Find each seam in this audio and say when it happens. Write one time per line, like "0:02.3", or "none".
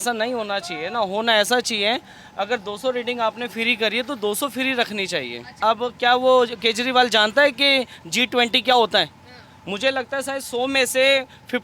0:05.6